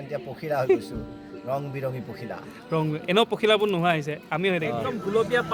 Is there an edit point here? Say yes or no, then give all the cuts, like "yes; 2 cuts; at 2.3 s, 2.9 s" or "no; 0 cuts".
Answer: no; 0 cuts